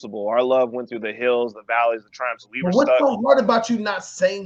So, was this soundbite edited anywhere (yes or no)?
no